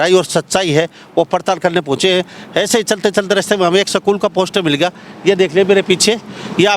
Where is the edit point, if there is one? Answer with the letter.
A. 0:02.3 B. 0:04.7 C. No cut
C